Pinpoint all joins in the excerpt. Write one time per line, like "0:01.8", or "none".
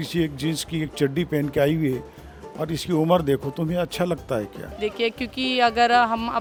none